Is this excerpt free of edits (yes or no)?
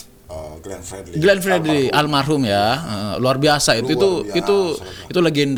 yes